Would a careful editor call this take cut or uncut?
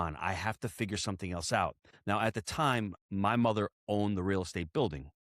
cut